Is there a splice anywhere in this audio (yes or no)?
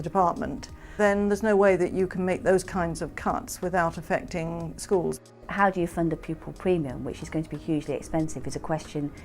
yes